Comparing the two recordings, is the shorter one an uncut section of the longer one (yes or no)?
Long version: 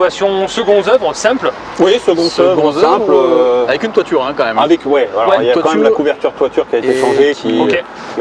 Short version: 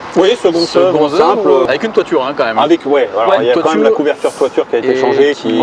no